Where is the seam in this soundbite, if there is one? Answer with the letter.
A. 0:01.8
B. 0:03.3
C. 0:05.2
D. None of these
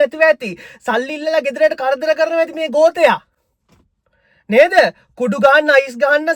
D